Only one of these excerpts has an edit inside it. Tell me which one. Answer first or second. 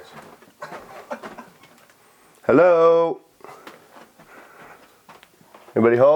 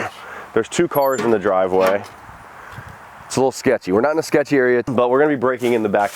second